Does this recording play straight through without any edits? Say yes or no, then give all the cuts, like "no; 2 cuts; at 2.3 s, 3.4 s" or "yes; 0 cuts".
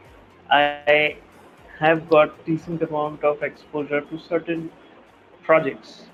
yes; 0 cuts